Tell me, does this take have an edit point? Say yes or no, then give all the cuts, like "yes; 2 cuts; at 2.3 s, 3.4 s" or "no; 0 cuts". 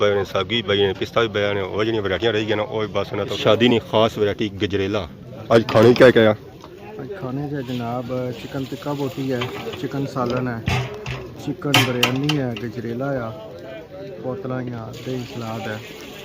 yes; 2 cuts; at 3.3 s, 5.3 s